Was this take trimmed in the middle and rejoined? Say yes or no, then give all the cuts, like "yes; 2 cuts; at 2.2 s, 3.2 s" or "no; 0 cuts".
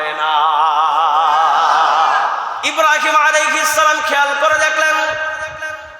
yes; 1 cut; at 2.6 s